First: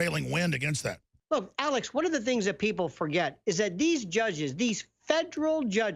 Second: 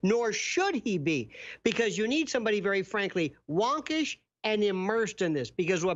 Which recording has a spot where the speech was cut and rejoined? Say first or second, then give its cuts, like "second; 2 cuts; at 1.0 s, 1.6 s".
first; 1 cut; at 1.1 s